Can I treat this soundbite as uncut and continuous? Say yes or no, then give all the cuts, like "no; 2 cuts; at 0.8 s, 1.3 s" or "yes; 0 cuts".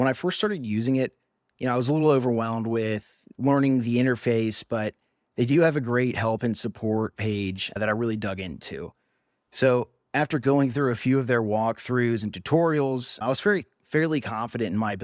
yes; 0 cuts